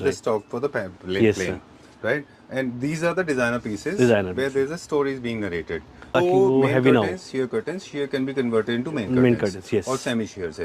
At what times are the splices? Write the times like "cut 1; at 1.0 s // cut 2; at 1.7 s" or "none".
cut 1; at 5.9 s